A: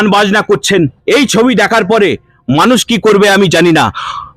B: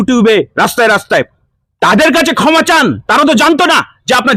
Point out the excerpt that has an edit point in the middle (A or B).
A